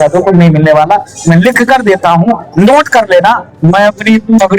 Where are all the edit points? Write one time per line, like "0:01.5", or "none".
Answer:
0:03.5